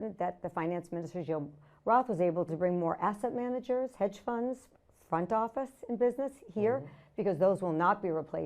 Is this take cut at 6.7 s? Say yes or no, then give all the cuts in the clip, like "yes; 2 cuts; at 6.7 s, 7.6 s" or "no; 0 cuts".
no; 1 cut; at 2.5 s